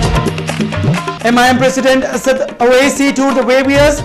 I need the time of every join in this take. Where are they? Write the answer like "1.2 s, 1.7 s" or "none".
1.1 s